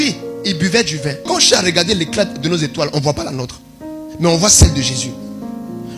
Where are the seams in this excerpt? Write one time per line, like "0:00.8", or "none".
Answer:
0:01.3